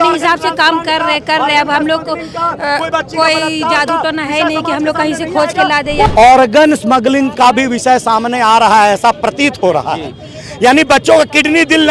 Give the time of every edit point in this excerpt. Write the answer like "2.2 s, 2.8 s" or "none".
6.1 s